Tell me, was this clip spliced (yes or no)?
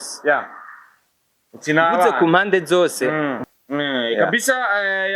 yes